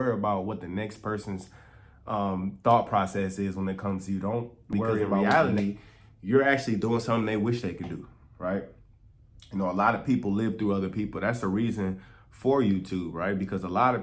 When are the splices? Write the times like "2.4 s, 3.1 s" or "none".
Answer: 5.2 s